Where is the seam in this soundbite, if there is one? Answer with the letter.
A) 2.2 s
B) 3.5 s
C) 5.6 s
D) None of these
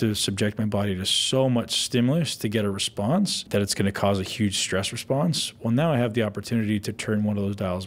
B